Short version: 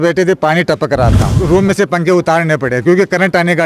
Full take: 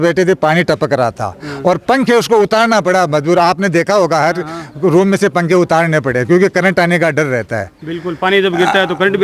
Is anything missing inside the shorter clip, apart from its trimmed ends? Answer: yes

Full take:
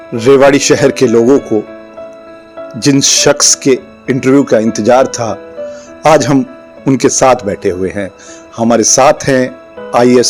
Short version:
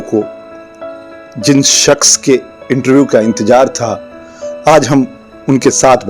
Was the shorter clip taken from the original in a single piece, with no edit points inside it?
yes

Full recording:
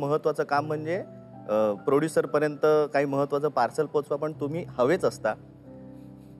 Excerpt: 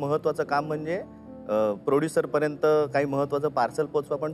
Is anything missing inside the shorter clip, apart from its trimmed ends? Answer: no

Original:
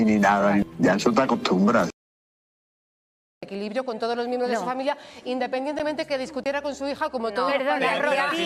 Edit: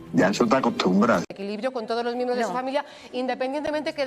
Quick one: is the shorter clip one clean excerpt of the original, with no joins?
no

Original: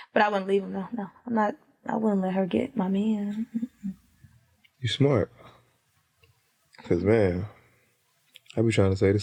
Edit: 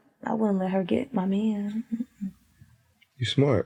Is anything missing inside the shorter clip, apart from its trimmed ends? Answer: no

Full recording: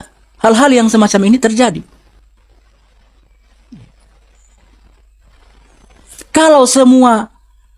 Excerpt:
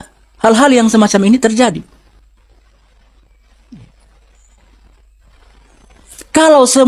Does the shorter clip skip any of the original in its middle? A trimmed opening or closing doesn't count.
no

